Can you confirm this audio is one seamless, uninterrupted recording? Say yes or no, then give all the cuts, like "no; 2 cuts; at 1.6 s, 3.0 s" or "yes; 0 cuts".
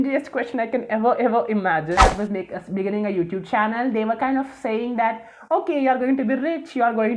no; 1 cut; at 2.0 s